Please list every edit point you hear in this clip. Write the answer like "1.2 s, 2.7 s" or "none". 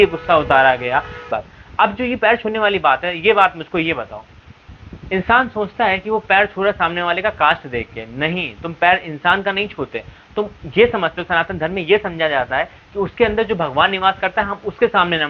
1.2 s